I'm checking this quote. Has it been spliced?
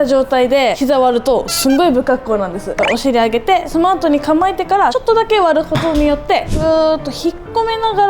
yes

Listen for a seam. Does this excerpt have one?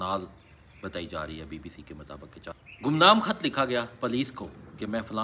yes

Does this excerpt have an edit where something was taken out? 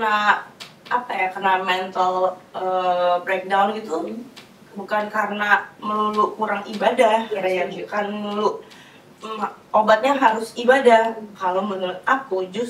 no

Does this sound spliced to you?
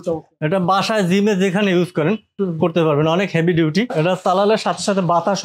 yes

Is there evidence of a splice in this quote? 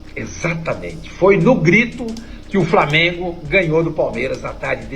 no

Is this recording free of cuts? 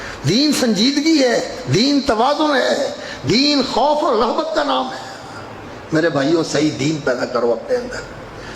no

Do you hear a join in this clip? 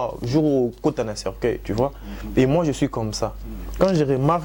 no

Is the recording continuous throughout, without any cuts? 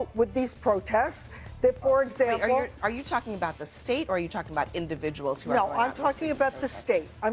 yes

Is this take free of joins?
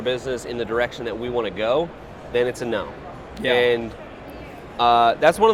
yes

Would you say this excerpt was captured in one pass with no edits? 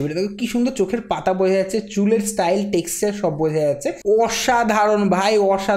no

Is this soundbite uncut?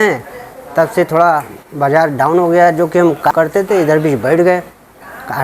no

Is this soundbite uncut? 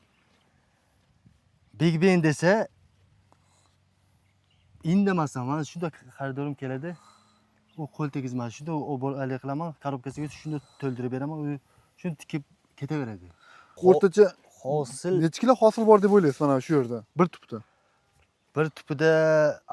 no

